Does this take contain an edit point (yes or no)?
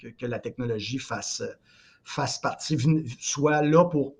no